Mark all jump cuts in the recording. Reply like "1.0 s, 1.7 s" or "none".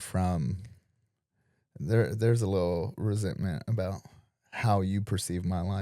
none